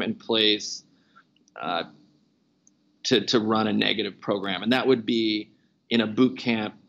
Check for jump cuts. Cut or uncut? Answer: uncut